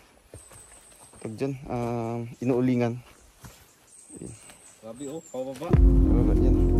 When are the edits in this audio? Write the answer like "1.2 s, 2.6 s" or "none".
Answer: 5.7 s